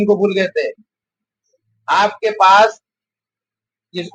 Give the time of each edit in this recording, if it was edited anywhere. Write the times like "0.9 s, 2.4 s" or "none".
none

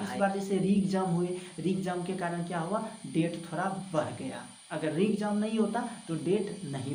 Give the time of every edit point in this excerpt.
none

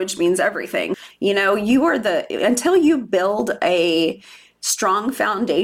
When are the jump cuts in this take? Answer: 1.0 s

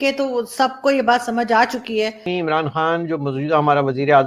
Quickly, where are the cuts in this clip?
2.2 s

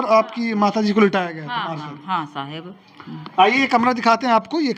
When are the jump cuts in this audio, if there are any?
none

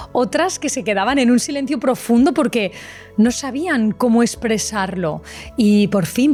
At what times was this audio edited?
none

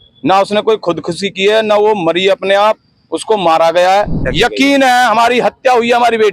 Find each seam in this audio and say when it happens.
4.2 s

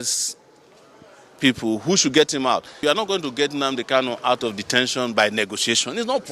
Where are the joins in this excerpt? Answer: 2.8 s

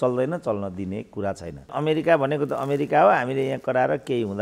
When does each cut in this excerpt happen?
1.7 s

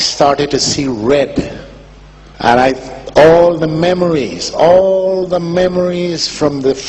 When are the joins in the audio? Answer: 4.8 s

